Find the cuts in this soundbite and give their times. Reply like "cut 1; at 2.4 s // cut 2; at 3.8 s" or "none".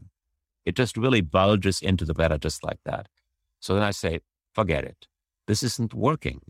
cut 1; at 2.1 s